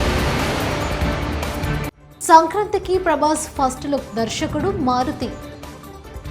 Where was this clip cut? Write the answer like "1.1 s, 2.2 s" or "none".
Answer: 2.1 s